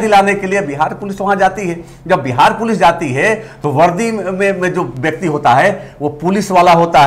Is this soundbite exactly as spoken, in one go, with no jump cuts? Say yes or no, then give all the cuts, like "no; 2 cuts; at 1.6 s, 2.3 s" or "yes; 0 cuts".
yes; 0 cuts